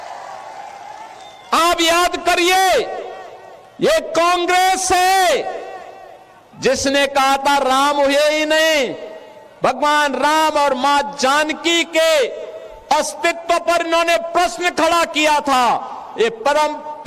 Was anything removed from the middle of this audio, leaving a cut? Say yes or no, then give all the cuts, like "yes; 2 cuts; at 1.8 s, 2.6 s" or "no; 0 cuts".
no; 0 cuts